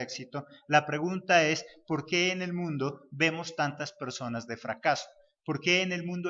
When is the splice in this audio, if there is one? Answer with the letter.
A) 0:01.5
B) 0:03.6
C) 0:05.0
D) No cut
A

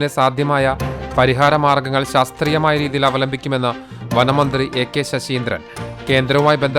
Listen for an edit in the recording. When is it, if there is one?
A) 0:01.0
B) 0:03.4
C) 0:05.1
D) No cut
A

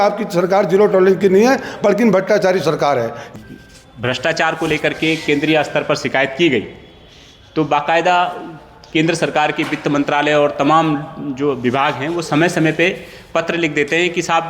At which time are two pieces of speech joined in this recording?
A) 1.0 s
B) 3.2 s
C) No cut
B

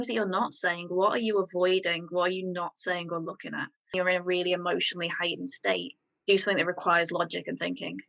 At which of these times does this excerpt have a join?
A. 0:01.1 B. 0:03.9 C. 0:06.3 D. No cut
B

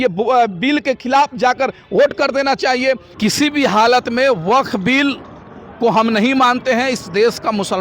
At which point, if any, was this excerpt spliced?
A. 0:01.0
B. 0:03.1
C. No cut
B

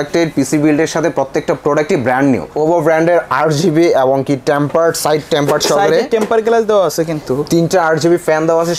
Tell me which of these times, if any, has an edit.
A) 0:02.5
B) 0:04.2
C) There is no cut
A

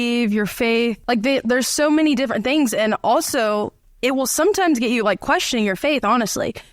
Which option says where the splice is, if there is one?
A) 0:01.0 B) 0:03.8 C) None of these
A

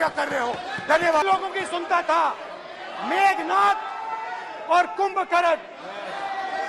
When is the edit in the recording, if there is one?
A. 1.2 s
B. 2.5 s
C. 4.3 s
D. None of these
A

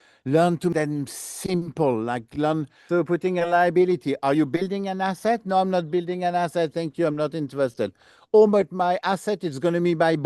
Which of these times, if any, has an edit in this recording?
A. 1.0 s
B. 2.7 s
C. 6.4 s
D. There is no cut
B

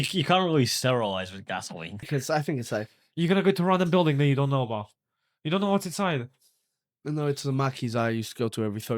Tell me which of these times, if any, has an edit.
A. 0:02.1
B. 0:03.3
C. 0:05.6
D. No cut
A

